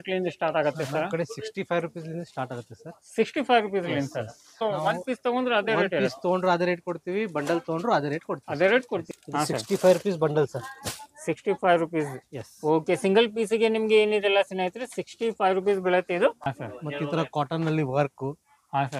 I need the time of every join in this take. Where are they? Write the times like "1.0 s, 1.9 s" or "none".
4.7 s, 9.1 s, 16.6 s